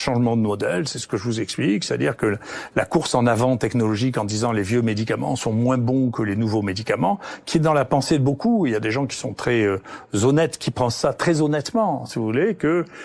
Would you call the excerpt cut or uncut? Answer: uncut